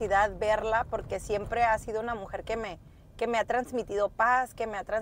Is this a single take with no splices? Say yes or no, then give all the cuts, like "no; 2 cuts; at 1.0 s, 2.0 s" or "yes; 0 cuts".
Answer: yes; 0 cuts